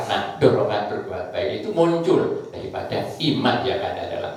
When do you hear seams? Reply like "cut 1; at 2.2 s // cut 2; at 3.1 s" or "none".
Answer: none